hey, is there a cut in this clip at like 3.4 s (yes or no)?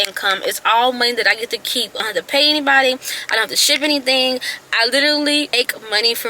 no